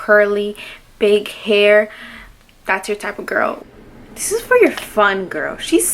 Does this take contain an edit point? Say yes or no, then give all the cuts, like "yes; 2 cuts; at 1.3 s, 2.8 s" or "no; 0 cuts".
yes; 1 cut; at 3.5 s